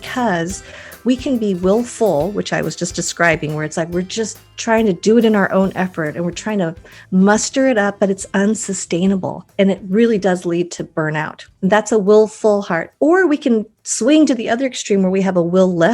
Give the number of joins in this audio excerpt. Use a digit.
2